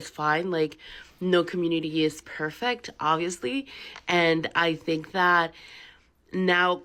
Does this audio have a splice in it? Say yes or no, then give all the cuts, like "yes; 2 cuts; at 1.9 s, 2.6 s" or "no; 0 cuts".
no; 0 cuts